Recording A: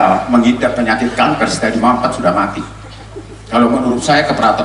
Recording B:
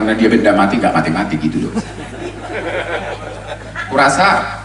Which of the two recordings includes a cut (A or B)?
B